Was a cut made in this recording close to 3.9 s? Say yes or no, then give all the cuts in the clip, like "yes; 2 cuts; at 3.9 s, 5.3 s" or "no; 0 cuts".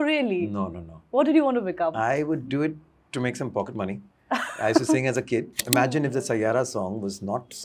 no; 1 cut; at 5.6 s